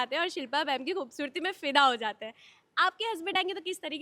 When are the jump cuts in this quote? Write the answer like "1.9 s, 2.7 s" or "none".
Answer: none